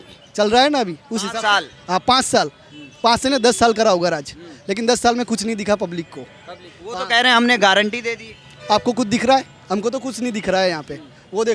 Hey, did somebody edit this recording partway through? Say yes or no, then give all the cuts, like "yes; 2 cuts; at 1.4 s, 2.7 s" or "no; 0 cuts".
no; 0 cuts